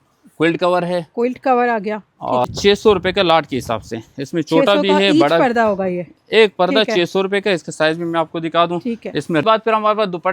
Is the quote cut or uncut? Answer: cut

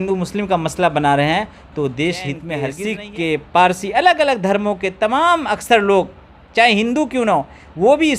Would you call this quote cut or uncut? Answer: cut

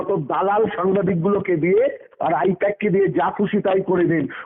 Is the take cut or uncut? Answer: uncut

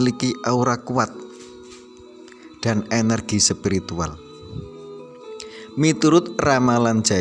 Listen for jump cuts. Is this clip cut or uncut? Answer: cut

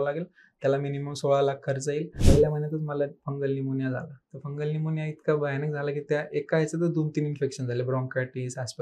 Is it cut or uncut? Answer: cut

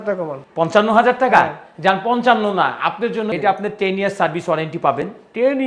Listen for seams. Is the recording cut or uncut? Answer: cut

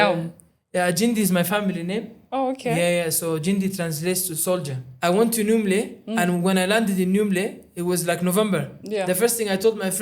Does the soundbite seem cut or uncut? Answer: cut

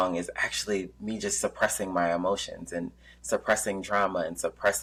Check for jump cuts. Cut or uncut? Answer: uncut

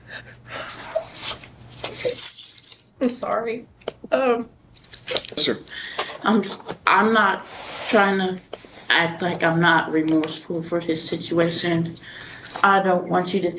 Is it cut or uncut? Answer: cut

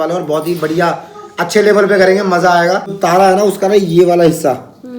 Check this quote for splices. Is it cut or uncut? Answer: cut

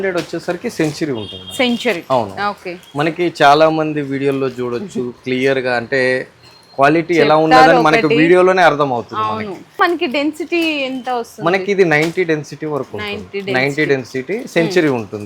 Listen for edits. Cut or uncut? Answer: uncut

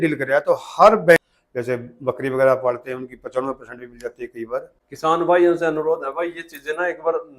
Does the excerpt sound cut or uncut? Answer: cut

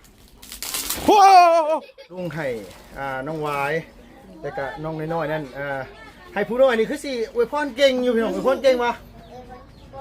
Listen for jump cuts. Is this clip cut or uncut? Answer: cut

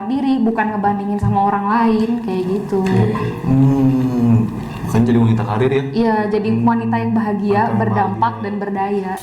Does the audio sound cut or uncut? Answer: uncut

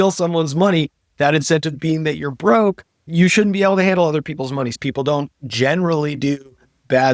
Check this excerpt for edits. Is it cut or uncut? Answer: cut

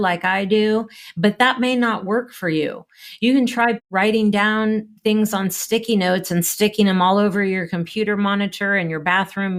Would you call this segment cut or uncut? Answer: uncut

